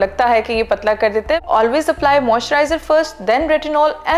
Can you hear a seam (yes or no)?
yes